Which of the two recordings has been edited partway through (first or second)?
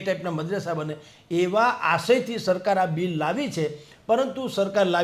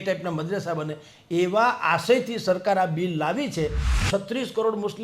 second